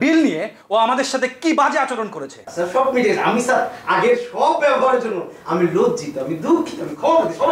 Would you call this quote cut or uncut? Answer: cut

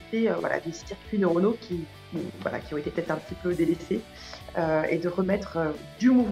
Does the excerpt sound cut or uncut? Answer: uncut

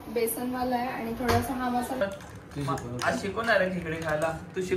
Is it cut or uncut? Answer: cut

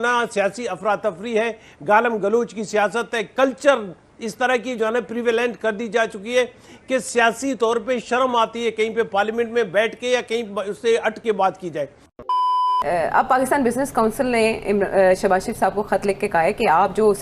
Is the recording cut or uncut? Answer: cut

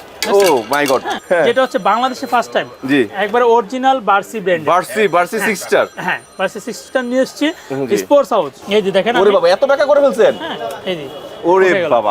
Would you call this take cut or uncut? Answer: cut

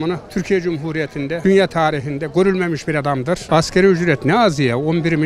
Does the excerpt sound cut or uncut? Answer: cut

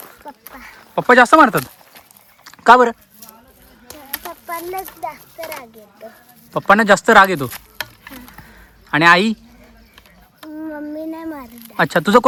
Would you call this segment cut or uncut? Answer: uncut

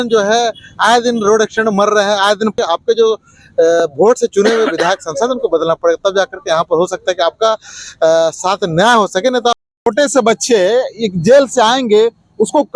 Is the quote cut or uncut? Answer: cut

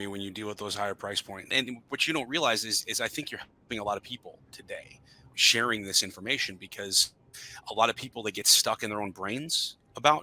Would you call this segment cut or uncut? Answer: cut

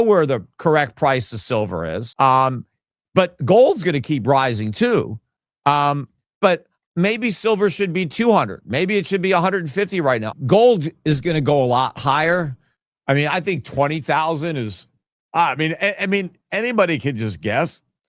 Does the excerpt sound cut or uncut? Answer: cut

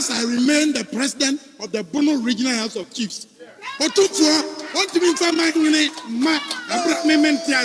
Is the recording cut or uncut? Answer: uncut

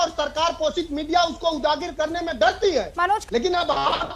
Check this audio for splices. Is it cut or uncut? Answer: cut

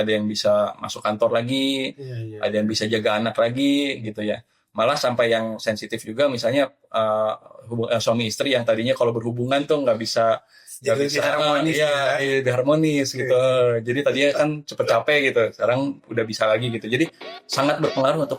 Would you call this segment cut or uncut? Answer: uncut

